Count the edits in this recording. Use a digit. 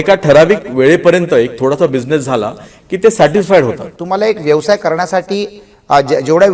1